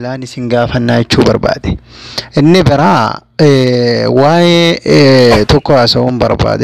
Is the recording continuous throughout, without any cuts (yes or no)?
yes